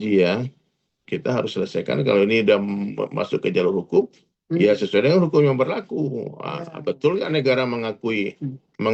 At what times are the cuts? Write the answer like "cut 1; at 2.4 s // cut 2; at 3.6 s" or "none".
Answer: cut 1; at 0.9 s